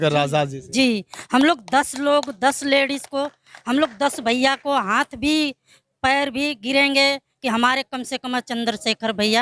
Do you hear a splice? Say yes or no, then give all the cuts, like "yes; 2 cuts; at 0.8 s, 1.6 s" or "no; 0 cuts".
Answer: no; 0 cuts